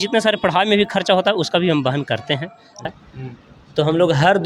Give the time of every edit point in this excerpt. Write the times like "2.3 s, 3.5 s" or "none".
2.9 s